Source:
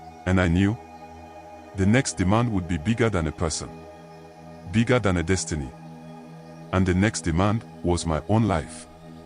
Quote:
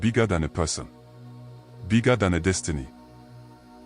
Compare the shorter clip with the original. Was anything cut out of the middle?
no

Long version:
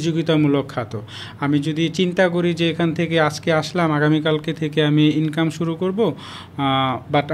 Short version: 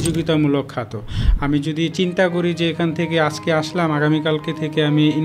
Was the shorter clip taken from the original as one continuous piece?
yes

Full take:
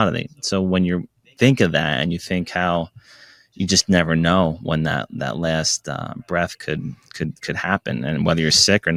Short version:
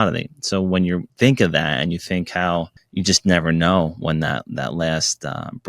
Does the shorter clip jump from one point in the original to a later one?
yes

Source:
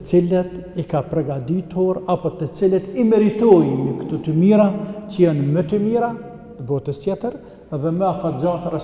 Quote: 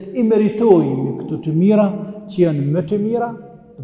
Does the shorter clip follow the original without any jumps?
yes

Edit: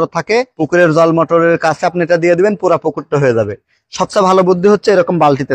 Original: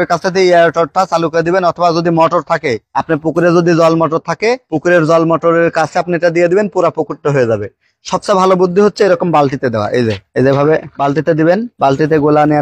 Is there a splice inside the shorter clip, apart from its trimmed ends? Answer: no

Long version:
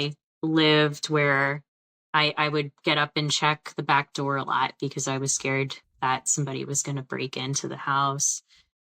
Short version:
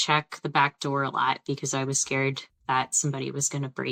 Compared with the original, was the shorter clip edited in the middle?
no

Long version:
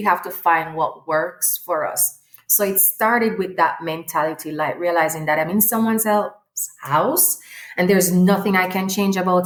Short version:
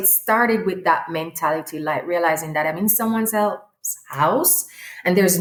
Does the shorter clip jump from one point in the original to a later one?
no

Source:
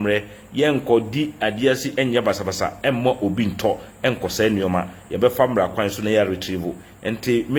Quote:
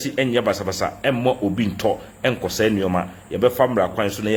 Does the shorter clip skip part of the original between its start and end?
no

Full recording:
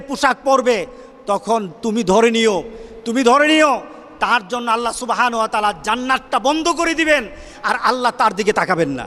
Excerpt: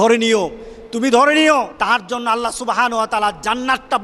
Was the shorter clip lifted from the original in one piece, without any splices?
no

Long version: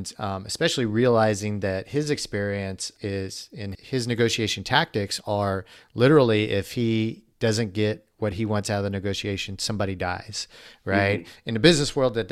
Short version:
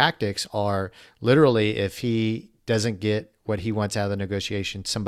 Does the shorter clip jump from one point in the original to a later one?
no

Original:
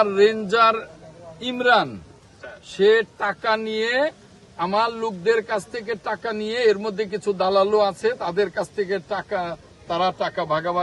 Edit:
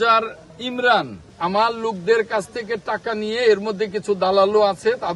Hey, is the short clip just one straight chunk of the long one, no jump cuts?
no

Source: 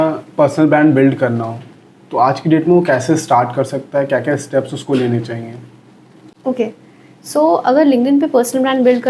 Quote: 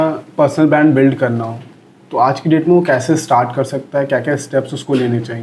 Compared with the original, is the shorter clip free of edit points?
yes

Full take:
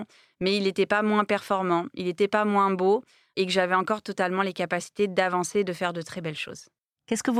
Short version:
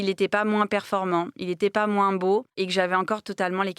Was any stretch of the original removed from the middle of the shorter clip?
yes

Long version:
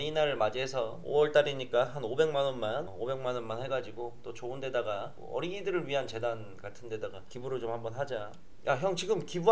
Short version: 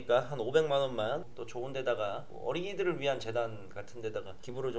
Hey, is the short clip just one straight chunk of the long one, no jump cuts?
no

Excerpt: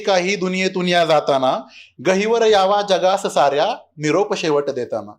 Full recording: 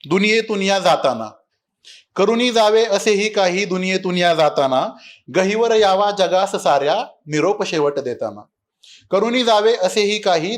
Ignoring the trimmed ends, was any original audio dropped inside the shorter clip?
no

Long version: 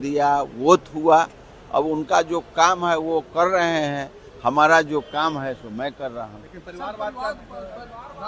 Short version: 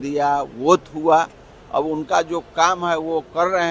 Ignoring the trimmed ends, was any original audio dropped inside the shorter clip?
no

